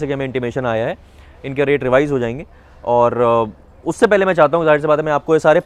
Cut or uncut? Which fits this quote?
uncut